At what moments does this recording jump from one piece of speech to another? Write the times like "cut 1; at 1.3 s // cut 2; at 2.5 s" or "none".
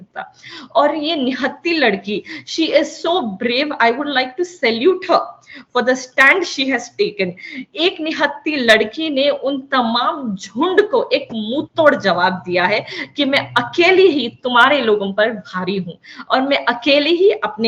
none